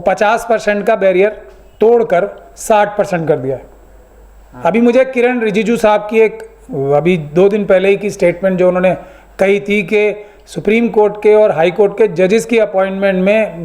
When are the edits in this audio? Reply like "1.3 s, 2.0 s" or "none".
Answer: none

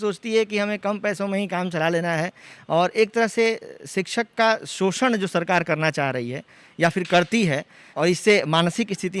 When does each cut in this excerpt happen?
7.8 s

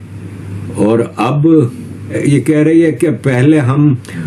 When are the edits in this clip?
none

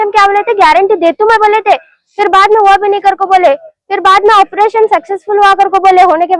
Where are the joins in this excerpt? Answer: none

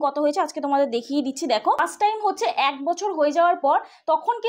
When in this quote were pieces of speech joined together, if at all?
1.8 s

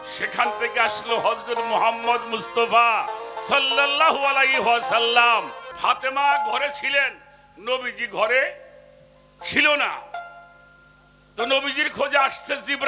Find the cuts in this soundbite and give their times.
5.6 s

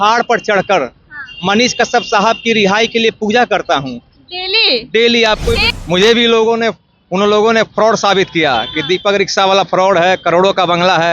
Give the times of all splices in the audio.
5.7 s

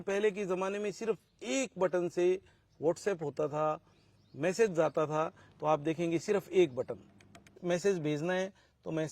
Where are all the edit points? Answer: 7.6 s

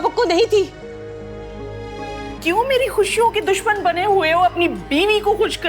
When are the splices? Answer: 2.3 s

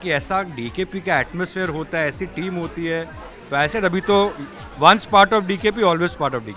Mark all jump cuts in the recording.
none

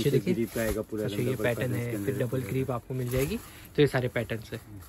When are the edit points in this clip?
none

